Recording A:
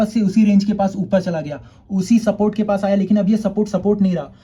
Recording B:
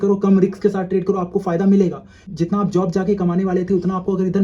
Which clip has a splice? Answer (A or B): B